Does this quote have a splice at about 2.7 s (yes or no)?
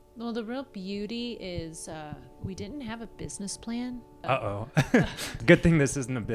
no